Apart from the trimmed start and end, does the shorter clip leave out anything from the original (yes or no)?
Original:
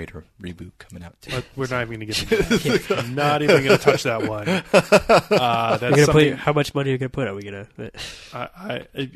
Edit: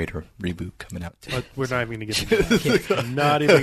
no